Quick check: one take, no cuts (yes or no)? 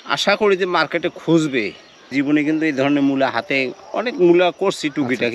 no